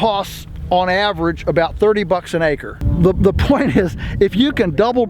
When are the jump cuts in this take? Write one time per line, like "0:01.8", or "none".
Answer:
0:02.8